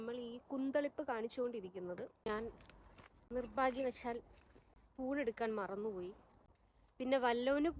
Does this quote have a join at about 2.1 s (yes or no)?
yes